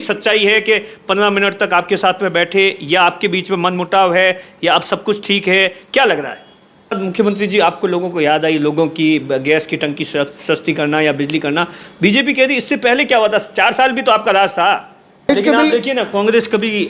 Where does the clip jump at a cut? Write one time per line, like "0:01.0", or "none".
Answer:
0:07.0
0:15.3